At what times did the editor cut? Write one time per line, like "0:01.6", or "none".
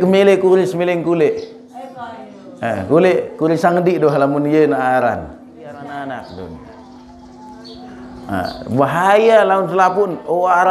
0:05.8